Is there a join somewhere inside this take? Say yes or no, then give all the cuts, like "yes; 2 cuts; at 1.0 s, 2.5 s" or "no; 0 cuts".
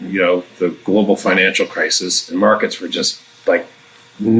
yes; 1 cut; at 2.3 s